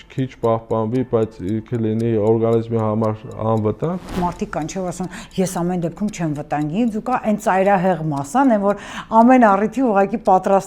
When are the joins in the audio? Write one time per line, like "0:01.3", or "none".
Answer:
0:04.1